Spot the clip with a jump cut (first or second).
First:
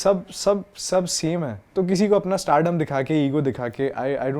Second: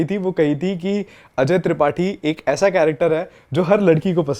first